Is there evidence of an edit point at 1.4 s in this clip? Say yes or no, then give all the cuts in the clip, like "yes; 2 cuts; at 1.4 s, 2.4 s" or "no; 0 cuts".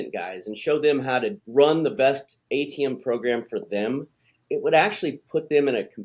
yes; 2 cuts; at 1.4 s, 2.3 s